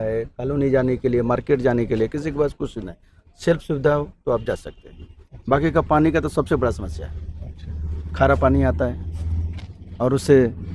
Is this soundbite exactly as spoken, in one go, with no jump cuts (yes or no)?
yes